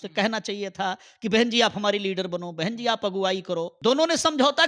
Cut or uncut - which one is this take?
cut